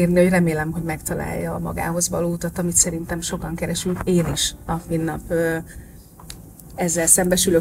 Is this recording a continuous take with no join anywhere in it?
yes; 0 cuts

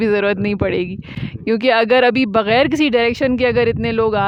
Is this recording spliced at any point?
no; 0 cuts

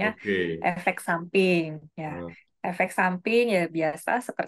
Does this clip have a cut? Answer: no; 0 cuts

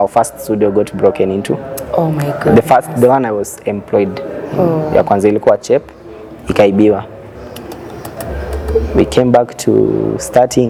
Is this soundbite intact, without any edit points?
yes; 0 cuts

